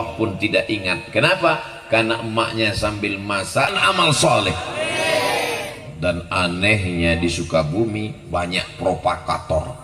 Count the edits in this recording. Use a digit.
1